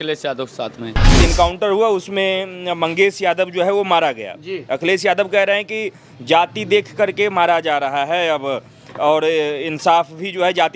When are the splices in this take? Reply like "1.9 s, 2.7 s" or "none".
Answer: 1.2 s